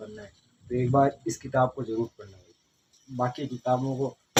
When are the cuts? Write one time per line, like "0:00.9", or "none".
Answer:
none